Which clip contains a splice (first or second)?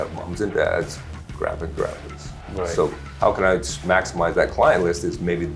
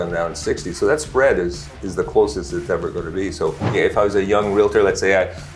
second